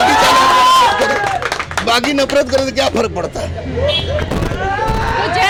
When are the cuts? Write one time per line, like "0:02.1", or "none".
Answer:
none